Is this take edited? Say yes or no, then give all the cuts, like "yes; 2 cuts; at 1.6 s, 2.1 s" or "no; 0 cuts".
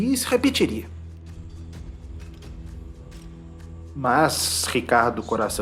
no; 0 cuts